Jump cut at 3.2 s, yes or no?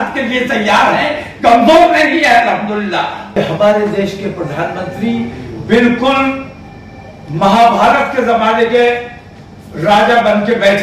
yes